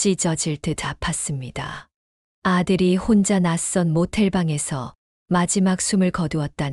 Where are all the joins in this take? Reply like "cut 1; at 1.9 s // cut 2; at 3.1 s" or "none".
none